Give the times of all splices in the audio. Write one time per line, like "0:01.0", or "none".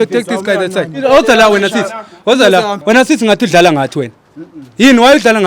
0:01.0
0:02.8